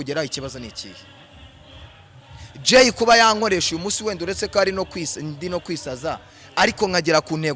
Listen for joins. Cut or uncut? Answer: uncut